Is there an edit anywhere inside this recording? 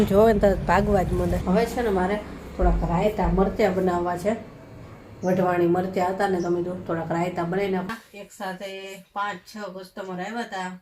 yes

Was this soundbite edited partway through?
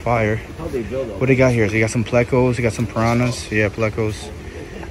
no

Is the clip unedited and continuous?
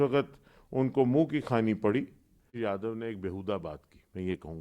no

